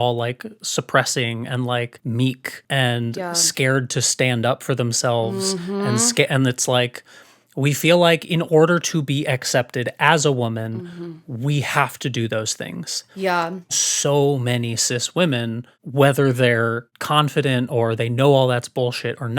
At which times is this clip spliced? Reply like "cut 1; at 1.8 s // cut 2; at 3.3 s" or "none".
cut 1; at 13.7 s